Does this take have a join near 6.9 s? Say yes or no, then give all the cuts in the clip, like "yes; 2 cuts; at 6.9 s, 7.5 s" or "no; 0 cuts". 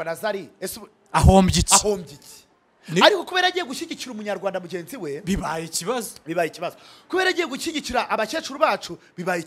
no; 0 cuts